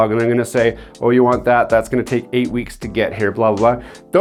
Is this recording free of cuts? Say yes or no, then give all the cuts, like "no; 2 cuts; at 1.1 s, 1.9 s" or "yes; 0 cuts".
yes; 0 cuts